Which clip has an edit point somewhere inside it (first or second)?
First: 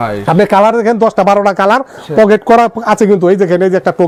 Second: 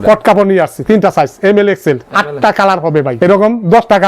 second